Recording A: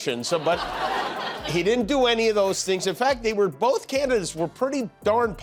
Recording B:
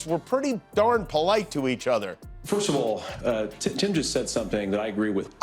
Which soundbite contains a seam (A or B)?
B